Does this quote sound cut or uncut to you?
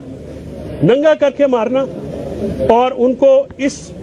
uncut